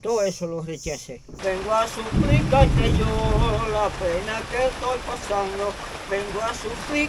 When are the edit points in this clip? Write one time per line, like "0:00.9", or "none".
0:01.2